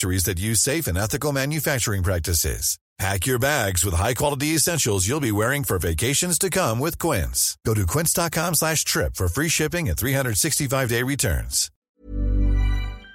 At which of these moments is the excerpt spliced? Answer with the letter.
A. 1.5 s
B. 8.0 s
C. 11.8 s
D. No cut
C